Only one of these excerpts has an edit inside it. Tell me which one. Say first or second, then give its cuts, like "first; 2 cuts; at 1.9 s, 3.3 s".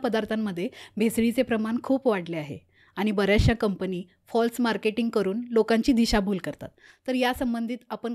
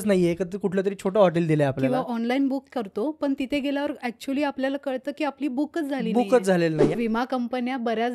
second; 1 cut; at 6.9 s